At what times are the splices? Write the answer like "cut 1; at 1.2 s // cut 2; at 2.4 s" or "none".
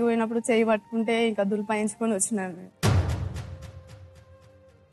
cut 1; at 2.7 s